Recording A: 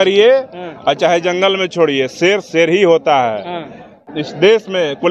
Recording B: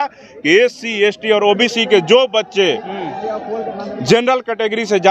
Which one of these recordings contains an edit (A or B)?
A